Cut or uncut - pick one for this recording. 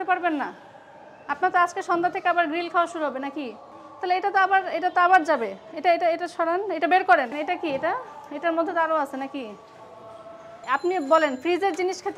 cut